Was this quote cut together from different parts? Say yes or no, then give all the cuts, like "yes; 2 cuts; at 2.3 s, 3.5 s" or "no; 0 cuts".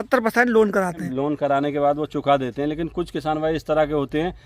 yes; 1 cut; at 1.0 s